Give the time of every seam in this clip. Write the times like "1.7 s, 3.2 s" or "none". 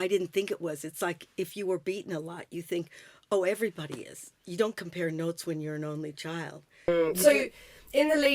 6.9 s